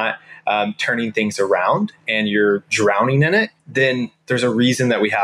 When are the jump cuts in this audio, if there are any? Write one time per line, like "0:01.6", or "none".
0:03.6

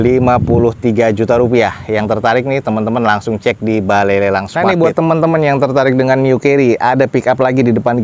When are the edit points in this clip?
0:04.5

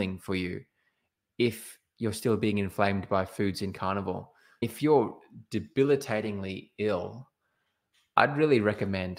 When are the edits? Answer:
0:04.7

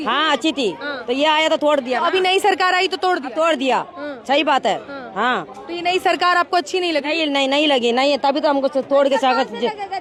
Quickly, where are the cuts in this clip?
none

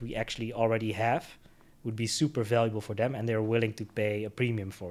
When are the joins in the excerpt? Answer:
none

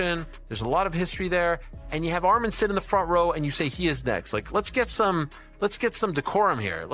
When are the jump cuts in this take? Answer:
0:05.4

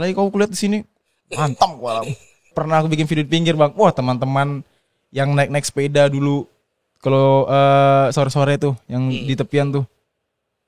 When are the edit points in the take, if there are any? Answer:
0:02.5

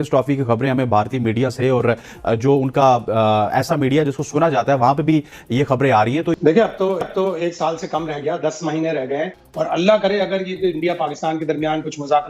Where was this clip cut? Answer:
0:09.4

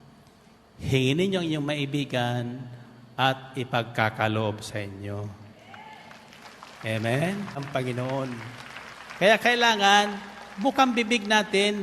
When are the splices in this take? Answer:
0:07.7

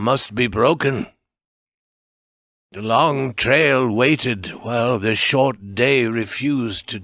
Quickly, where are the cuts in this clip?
0:04.9

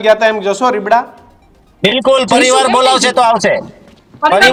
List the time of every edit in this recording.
none

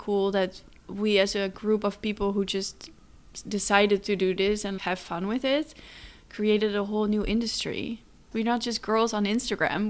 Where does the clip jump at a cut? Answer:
0:08.3

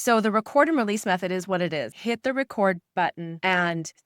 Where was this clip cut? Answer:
0:01.9

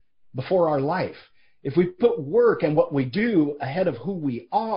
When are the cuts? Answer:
none

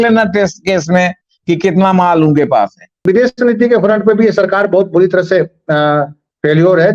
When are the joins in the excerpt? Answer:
0:03.0

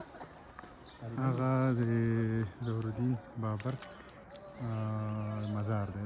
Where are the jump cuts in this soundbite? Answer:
none

